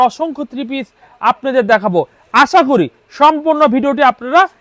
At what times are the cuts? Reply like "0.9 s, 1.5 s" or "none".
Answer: none